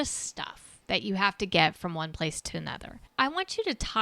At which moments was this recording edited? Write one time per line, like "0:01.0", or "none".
0:03.1